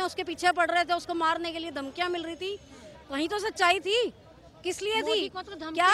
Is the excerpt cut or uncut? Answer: uncut